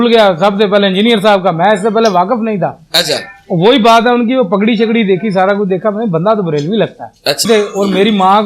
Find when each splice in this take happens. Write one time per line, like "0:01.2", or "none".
0:07.5